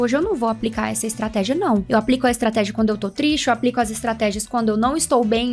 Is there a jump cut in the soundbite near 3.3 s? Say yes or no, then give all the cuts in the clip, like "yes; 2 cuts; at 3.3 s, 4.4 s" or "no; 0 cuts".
no; 1 cut; at 1.9 s